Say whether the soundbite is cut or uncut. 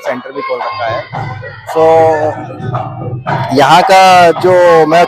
uncut